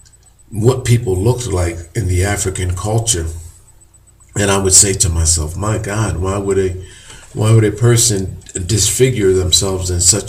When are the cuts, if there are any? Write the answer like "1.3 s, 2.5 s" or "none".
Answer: 7.9 s